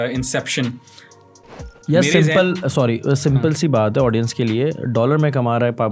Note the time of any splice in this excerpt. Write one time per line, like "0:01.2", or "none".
0:01.7